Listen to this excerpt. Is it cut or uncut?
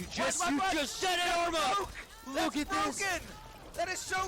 uncut